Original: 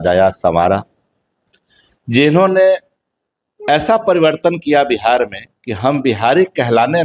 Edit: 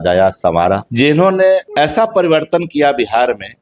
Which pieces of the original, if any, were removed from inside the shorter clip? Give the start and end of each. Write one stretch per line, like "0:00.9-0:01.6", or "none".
0:00.9-0:02.0
0:02.8-0:03.6